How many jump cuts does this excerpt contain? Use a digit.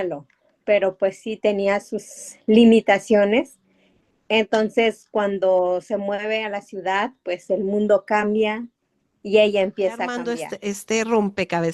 1